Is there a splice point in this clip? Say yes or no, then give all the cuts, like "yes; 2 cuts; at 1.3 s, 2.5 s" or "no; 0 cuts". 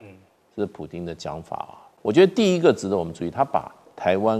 yes; 1 cut; at 1.8 s